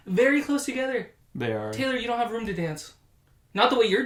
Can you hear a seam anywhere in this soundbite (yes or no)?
no